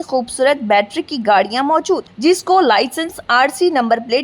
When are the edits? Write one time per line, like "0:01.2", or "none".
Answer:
none

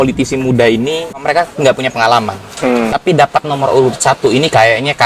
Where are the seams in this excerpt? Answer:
0:01.2

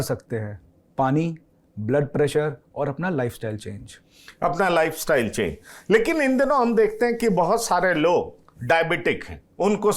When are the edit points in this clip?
none

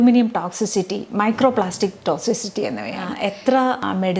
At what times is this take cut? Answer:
0:03.1

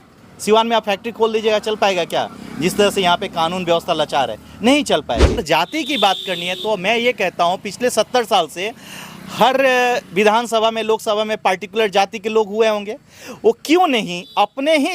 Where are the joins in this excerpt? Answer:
0:05.4

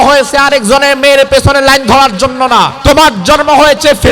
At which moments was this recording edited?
0:02.8

